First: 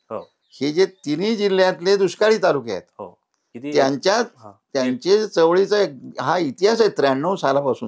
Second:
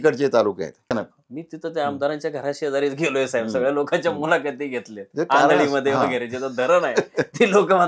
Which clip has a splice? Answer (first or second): second